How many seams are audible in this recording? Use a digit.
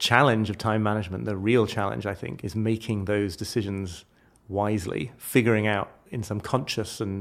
2